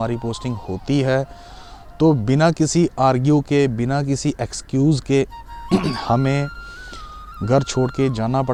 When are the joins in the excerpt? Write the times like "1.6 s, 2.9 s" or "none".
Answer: none